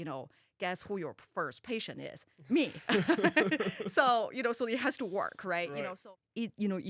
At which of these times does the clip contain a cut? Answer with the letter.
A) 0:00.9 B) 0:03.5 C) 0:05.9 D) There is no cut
C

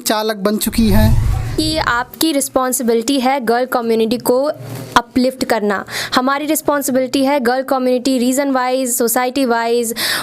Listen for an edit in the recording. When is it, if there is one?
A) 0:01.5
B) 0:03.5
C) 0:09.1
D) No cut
A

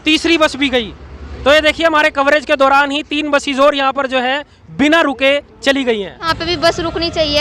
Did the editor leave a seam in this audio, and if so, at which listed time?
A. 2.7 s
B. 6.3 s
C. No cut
B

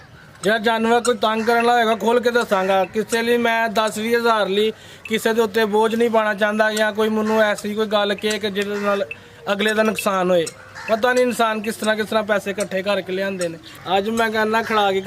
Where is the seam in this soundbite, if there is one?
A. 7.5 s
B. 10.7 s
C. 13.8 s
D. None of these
C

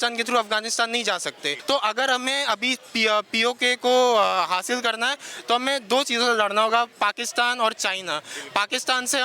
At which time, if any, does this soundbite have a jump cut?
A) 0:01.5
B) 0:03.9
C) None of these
A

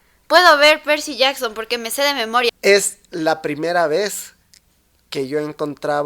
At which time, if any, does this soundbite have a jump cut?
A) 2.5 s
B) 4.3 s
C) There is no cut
A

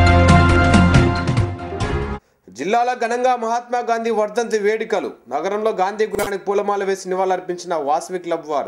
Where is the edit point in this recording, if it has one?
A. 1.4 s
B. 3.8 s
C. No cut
A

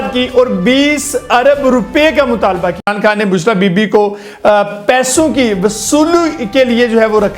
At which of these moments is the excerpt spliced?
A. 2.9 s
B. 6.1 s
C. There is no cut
A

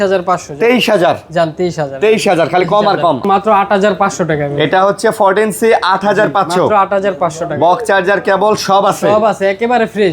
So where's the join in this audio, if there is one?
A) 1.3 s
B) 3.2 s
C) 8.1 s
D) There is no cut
B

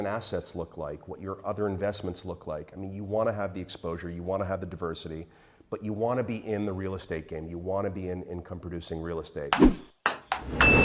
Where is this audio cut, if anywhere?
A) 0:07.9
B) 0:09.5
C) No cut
B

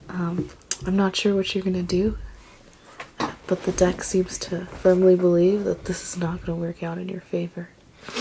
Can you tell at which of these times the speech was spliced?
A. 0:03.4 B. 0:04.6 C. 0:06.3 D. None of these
D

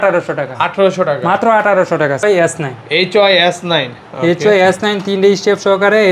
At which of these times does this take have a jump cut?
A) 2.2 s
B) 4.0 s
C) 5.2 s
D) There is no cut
A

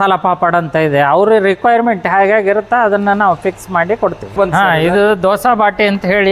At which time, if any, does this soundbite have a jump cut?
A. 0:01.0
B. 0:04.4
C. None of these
B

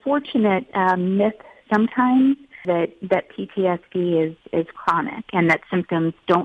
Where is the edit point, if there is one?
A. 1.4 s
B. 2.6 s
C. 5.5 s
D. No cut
B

